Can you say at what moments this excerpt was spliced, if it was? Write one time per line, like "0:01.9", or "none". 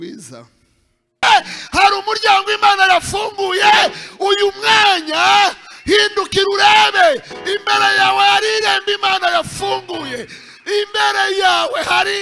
0:01.2

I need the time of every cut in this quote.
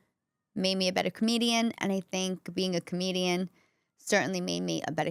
none

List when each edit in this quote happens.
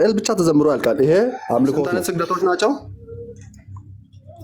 0:02.0

